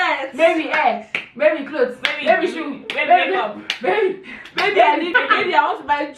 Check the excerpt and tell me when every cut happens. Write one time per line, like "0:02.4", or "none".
0:05.1